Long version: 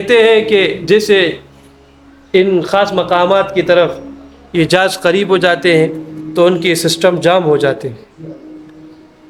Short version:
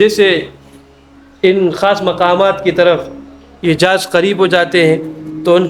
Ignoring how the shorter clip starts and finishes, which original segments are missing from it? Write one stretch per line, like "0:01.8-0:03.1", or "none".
none

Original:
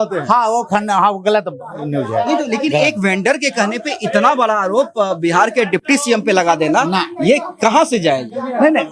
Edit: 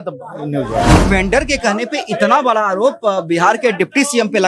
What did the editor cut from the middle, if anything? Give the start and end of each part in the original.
0:02.4-0:02.9

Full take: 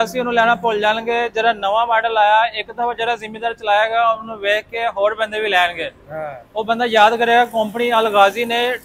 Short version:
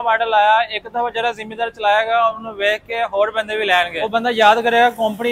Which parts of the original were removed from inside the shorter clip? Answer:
0:05.8-0:06.5

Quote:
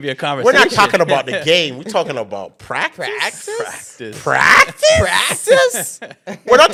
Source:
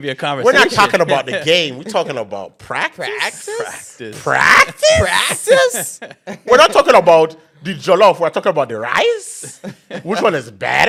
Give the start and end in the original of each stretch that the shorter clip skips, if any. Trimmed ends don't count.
none

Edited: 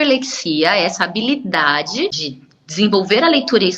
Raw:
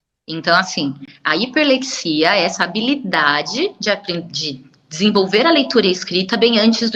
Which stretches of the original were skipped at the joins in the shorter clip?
0:03.8-0:04.4

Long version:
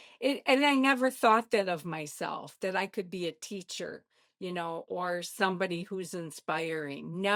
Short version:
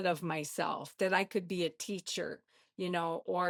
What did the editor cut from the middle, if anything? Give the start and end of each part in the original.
none

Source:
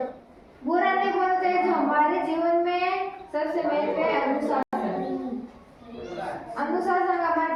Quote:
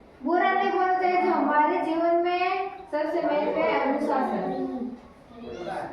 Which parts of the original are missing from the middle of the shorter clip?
0:04.6-0:04.7

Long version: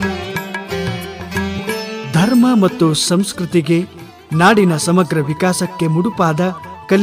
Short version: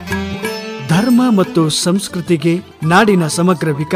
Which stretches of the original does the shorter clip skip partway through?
0:04.0-0:04.2

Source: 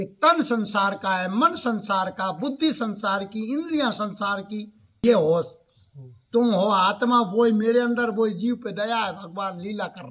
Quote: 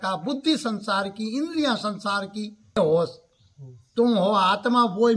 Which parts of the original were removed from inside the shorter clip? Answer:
0:04.9-0:05.1

